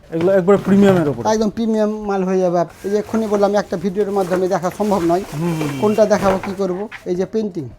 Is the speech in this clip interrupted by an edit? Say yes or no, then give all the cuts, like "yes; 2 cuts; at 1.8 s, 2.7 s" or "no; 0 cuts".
yes; 1 cut; at 2.7 s